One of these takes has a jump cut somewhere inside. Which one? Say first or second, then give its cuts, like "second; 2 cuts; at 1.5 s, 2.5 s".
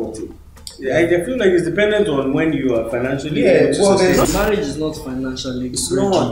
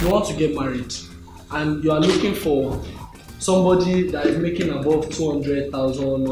first; 1 cut; at 4.2 s